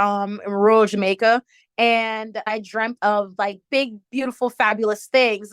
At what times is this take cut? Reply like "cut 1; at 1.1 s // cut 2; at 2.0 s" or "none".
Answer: cut 1; at 2.4 s